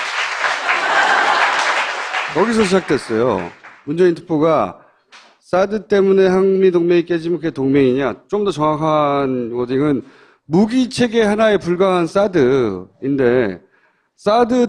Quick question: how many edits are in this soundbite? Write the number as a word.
one